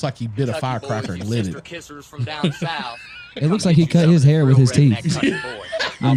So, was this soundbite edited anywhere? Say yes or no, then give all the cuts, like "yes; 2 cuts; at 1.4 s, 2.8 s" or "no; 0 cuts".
no; 0 cuts